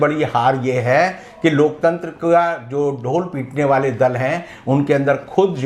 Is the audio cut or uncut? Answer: uncut